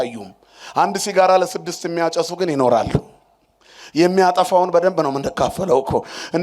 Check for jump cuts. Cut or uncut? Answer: uncut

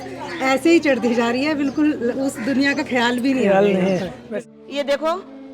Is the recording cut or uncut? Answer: cut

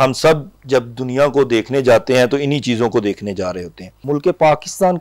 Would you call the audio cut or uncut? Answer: cut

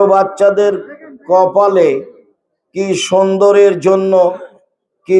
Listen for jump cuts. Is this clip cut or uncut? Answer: uncut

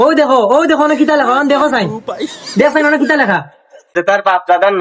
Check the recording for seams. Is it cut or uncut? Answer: cut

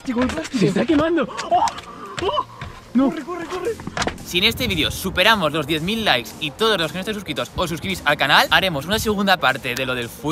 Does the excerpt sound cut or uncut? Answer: cut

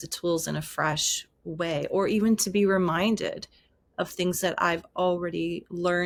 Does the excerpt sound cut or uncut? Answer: uncut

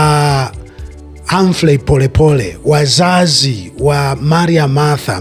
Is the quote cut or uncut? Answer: uncut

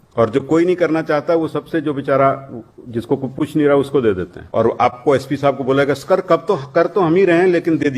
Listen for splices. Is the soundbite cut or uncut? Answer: cut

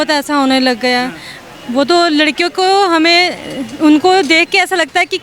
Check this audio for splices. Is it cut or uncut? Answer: uncut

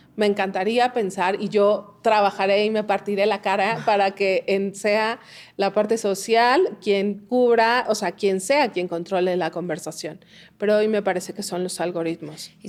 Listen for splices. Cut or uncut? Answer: uncut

